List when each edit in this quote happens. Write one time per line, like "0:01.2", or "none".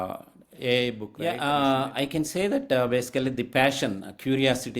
0:01.1